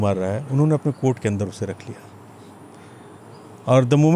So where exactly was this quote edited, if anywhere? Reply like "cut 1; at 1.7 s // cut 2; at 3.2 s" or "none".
none